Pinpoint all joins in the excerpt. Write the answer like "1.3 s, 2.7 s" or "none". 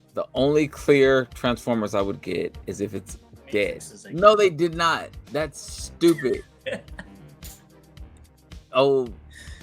3.9 s, 7.0 s, 8.3 s